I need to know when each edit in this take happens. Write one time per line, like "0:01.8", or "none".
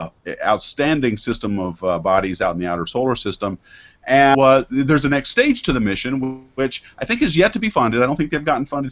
none